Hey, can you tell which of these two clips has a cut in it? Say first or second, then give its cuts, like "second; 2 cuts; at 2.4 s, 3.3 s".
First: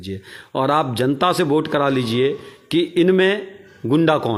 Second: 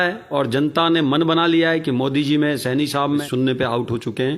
second; 1 cut; at 3.3 s